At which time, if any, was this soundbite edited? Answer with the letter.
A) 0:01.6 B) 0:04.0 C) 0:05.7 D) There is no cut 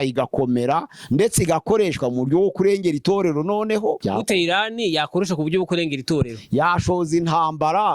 B